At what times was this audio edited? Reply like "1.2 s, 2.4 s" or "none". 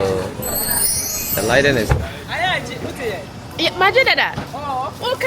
1.9 s